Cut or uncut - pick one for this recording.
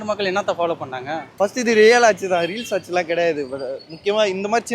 cut